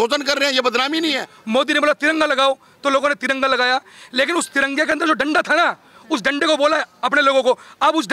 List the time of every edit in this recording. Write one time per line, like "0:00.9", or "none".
0:01.3